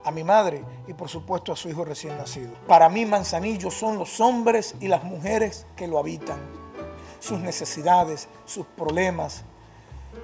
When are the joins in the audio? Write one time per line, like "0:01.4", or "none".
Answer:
0:02.5